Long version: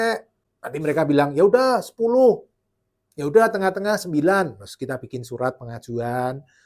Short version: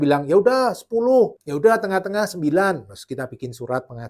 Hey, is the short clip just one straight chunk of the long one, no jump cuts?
no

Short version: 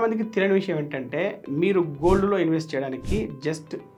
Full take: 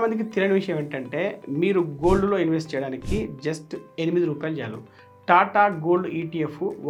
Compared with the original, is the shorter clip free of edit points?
yes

